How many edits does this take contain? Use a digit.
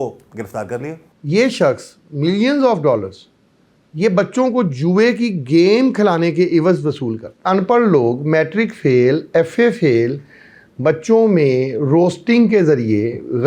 2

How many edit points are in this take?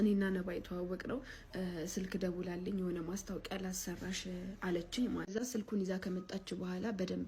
1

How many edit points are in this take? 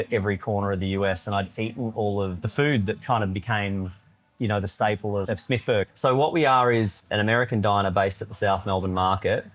3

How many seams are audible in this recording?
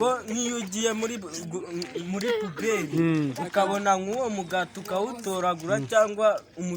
0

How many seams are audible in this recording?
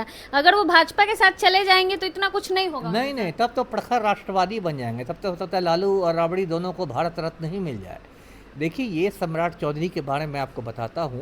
0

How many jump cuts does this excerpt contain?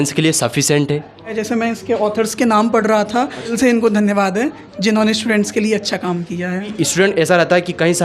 3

